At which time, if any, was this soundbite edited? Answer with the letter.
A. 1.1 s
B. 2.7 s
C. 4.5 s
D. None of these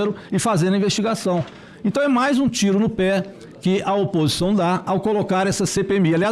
D